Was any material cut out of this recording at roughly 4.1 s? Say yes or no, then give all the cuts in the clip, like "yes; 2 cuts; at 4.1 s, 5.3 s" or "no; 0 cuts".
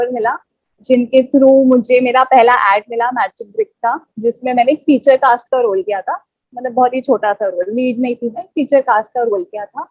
no; 0 cuts